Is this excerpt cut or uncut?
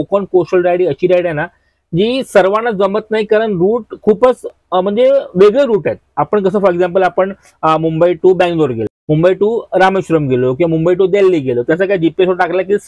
uncut